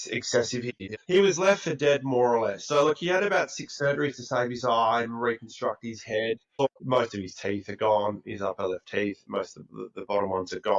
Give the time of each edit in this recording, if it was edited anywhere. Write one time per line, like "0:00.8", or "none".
0:01.0
0:06.6